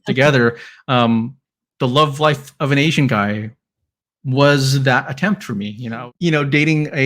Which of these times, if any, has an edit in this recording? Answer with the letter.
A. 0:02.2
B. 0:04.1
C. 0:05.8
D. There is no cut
C